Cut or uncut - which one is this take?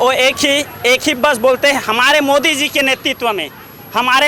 uncut